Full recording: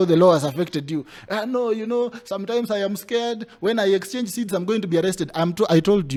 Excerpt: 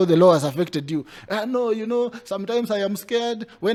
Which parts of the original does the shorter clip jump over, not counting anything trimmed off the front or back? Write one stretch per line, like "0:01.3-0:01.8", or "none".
none